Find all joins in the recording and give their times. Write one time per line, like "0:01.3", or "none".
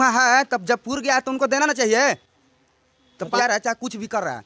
0:03.4